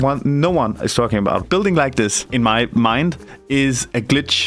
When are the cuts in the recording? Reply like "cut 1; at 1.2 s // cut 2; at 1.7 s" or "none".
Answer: cut 1; at 1.5 s // cut 2; at 2.2 s // cut 3; at 3.3 s